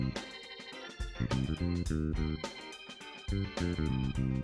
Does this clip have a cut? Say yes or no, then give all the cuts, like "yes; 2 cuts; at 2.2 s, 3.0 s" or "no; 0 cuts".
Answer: no; 0 cuts